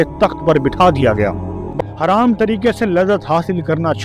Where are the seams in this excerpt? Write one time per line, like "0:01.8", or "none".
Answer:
0:01.6